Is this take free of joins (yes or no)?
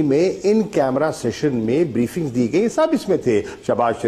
yes